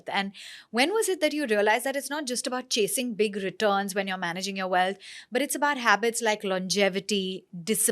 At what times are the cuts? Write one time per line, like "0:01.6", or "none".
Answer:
none